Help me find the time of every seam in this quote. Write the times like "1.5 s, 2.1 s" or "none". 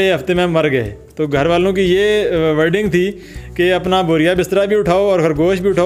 none